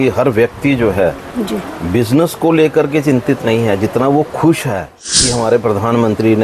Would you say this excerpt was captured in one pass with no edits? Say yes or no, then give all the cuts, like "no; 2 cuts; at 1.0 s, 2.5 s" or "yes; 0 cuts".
no; 1 cut; at 5.0 s